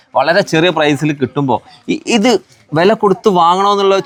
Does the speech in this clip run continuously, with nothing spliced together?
yes; 0 cuts

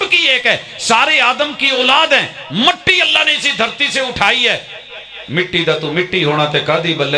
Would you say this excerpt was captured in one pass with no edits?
yes; 0 cuts

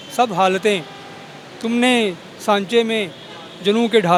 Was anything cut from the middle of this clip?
no; 0 cuts

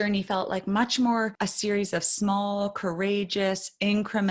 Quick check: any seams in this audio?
yes; 1 cut; at 1.3 s

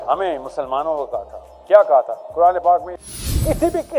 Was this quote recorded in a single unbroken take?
no; 1 cut; at 2.9 s

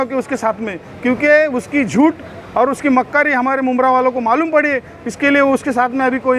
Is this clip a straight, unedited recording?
yes; 0 cuts

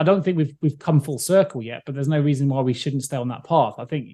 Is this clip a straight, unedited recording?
yes; 0 cuts

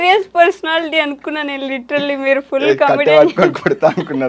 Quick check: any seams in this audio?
no; 0 cuts

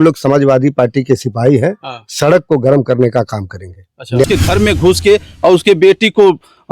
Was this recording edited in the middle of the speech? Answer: yes; 1 cut; at 4.2 s

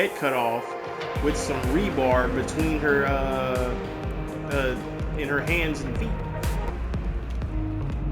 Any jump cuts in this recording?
yes; 1 cut; at 6.7 s

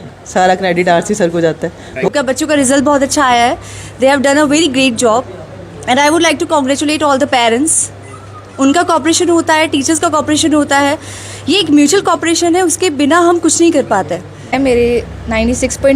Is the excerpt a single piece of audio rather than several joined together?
no; 2 cuts; at 2.1 s, 14.5 s

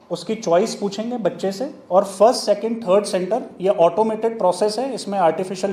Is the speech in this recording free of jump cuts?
yes; 0 cuts

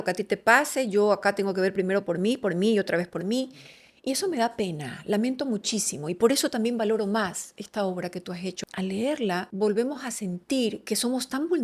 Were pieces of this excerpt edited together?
yes; 3 cuts; at 8.6 s, 9.5 s, 10.8 s

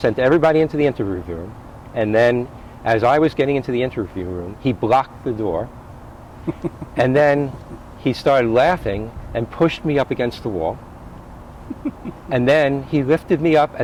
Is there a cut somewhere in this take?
no; 0 cuts

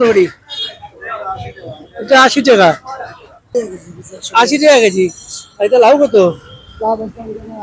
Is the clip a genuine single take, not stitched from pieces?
no; 1 cut; at 3.4 s

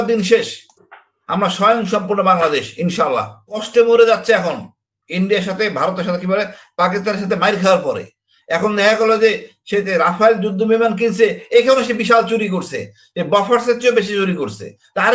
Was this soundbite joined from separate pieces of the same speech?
yes; 1 cut; at 3.6 s

